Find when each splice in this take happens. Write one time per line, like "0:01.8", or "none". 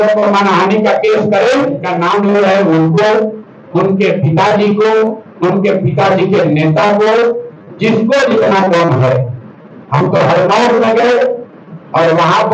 0:01.9